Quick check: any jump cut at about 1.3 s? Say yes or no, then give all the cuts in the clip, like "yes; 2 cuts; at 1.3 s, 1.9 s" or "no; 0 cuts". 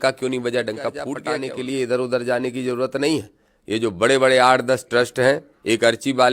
yes; 1 cut; at 1.3 s